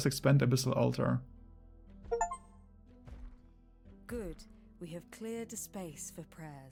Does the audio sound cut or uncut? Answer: uncut